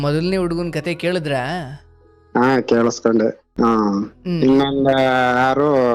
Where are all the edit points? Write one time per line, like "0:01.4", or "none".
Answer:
0:03.4

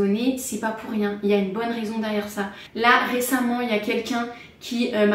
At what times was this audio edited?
none

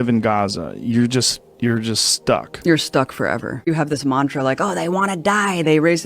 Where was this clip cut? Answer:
0:03.7

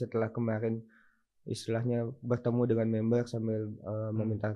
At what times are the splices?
none

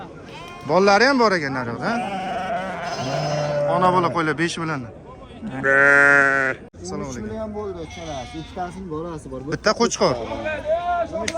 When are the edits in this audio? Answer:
0:06.7

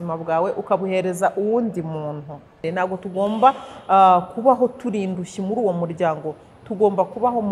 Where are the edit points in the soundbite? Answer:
0:02.6

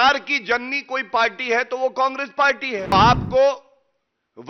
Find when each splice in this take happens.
0:02.9

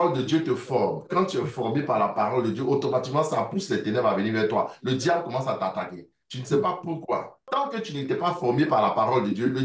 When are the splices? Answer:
0:07.4

